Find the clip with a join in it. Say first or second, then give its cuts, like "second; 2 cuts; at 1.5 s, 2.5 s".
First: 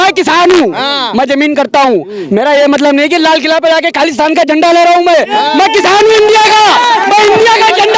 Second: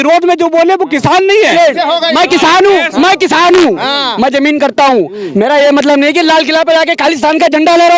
second; 1 cut; at 1.5 s